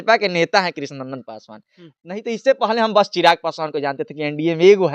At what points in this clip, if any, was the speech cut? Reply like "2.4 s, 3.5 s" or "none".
none